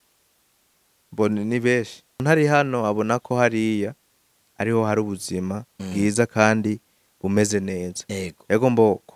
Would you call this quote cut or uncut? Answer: cut